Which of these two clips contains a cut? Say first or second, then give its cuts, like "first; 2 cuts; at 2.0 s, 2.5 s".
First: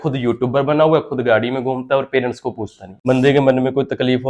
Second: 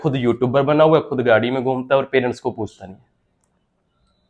first; 1 cut; at 2.9 s